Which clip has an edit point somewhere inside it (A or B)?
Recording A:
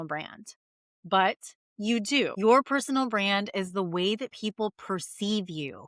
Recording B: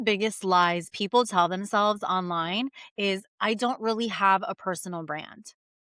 A